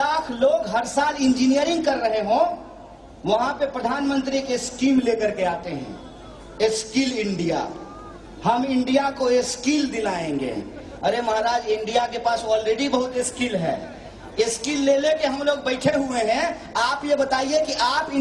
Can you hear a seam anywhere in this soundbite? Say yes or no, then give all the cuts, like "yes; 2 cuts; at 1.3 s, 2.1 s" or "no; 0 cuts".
no; 0 cuts